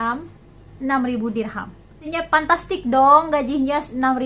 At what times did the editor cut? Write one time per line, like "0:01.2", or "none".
0:02.0